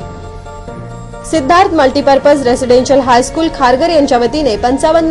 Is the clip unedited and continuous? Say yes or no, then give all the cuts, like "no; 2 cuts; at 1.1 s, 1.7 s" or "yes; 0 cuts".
no; 1 cut; at 1.1 s